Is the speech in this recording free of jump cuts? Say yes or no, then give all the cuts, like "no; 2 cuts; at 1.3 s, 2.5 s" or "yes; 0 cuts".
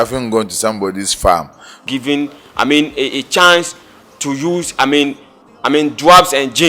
no; 1 cut; at 1.8 s